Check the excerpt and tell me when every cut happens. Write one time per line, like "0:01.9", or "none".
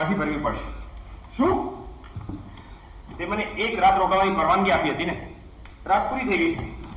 none

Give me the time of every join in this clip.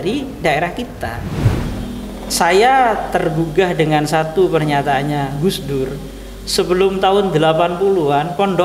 0:01.5

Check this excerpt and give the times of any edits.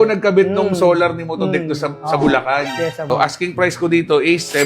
0:03.1

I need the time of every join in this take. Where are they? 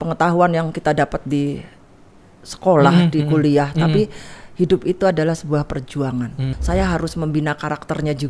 0:06.4

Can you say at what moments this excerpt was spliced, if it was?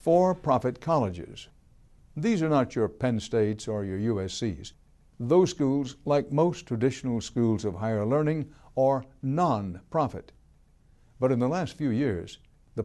0:08.4

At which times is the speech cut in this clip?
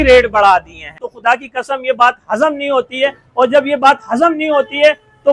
0:01.1

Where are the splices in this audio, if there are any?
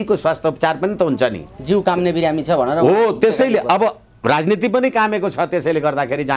none

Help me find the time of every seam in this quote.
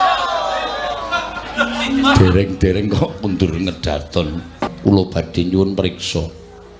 0:04.7

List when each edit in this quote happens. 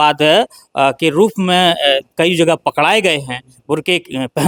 none

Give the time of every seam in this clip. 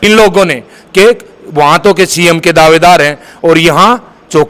none

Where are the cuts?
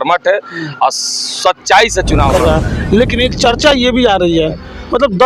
0:02.3

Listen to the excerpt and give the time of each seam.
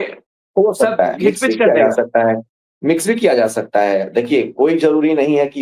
none

